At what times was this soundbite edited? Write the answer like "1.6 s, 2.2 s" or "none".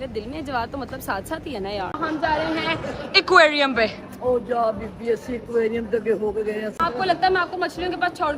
2.0 s, 6.8 s